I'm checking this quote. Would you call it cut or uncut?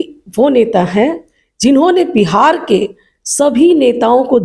uncut